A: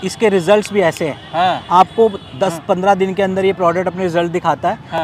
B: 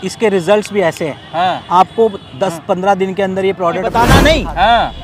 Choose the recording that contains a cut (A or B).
B